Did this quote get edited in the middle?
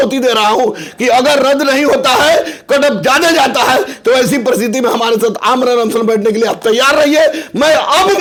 no; 0 cuts

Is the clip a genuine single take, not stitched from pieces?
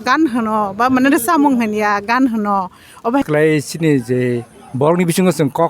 no; 1 cut; at 3.0 s

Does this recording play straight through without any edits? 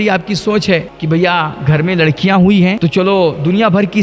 no; 2 cuts; at 0.9 s, 2.8 s

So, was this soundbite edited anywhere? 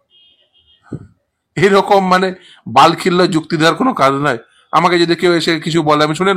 no; 0 cuts

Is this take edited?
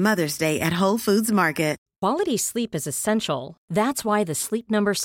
yes; 1 cut; at 1.8 s

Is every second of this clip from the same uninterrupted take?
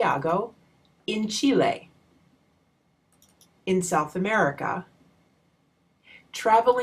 no; 1 cut; at 5.7 s

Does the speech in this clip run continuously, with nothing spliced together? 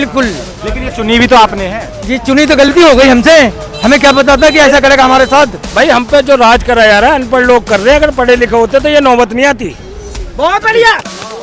no; 1 cut; at 5.6 s

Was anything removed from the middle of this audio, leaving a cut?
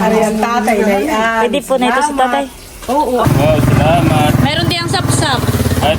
yes; 1 cut; at 3.2 s

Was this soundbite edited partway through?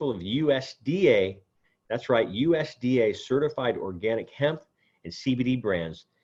no; 0 cuts

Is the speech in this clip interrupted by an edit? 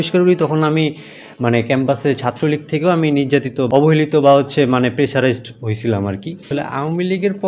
yes; 2 cuts; at 3.7 s, 6.4 s

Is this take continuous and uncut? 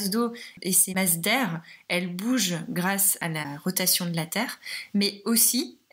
no; 2 cuts; at 1.0 s, 3.4 s

